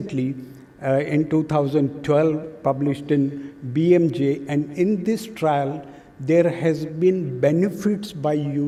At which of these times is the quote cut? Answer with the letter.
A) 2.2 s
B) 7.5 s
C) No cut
C